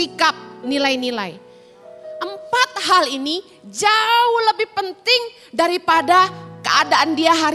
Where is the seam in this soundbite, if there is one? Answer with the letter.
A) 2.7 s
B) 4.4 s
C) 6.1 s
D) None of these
D